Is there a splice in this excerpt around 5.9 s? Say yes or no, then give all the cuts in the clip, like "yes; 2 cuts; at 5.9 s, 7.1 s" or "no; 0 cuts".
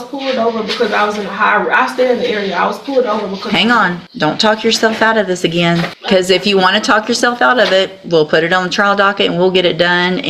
yes; 2 cuts; at 4.0 s, 5.9 s